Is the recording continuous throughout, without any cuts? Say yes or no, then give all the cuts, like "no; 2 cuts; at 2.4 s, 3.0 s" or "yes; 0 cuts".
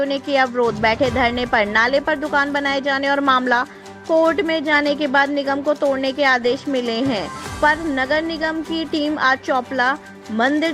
yes; 0 cuts